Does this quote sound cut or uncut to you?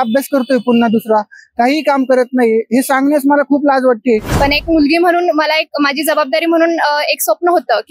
cut